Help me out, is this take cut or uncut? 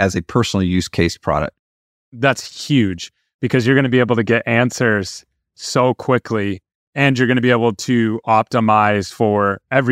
cut